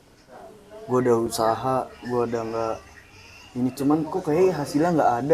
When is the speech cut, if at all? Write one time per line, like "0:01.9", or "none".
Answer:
none